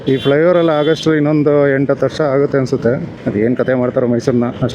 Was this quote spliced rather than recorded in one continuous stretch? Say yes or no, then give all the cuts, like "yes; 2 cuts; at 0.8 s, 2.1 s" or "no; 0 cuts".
yes; 1 cut; at 3.1 s